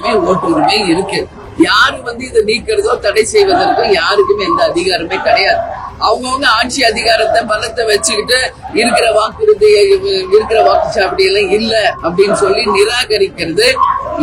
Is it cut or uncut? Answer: uncut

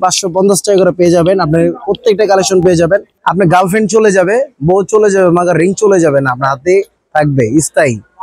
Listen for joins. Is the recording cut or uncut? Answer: cut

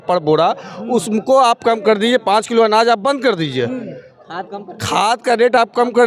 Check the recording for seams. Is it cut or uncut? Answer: uncut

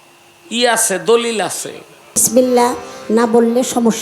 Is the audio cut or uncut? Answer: cut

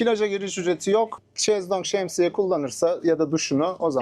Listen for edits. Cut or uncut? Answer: cut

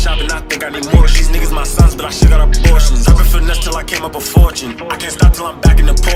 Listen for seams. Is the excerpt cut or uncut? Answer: uncut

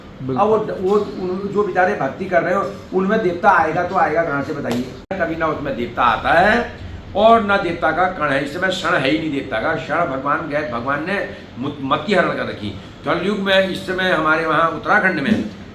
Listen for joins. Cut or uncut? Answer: cut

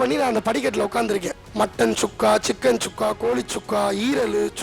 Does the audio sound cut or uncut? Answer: uncut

